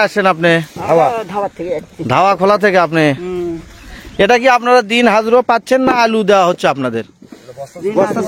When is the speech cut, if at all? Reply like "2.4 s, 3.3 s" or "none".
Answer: none